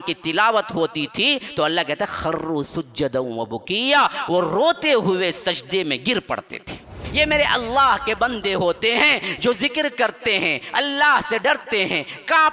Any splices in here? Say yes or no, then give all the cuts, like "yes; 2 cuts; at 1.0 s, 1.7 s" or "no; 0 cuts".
yes; 1 cut; at 7.0 s